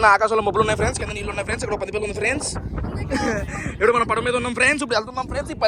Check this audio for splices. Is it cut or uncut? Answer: uncut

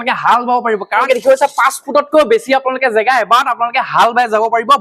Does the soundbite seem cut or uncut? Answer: cut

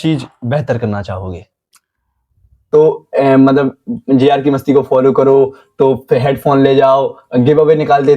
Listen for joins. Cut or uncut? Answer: cut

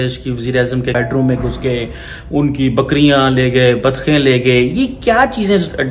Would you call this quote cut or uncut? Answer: cut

